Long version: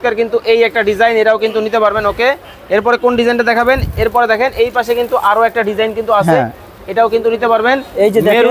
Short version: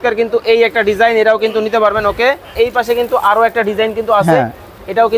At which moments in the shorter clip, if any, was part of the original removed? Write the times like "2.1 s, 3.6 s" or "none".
2.5 s